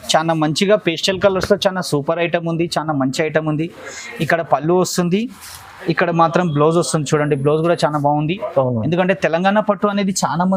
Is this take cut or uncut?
uncut